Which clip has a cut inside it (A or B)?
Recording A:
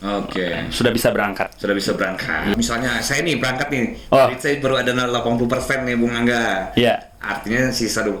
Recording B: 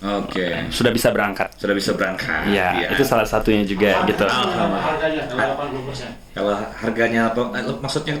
A